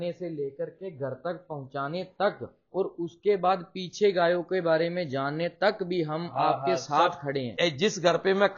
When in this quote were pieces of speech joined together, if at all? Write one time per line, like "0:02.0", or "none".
0:07.5